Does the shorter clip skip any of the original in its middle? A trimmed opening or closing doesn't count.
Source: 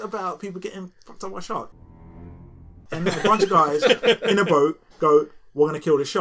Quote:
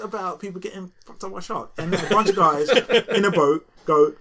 yes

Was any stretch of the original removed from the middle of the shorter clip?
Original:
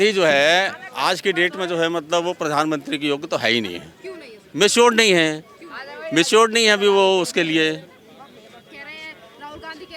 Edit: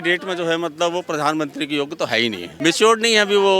yes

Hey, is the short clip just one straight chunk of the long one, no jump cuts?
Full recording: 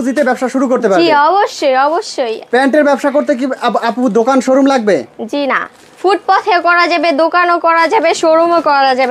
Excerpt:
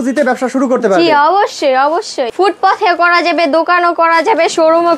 no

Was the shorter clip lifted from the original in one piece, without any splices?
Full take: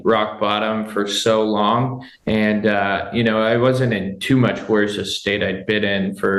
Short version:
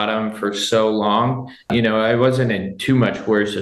no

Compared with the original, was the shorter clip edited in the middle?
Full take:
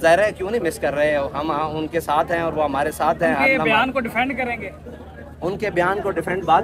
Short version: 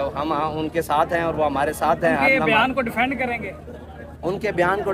no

